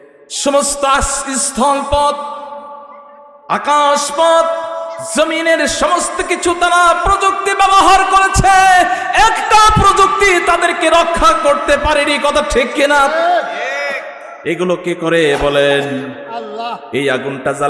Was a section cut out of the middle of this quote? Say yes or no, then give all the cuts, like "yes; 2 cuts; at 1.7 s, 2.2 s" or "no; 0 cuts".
no; 0 cuts